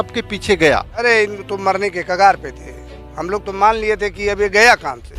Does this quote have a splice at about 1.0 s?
yes; 1 cut; at 1.0 s

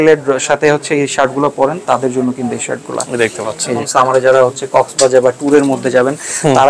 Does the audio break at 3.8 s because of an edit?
yes; 1 cut; at 3.8 s

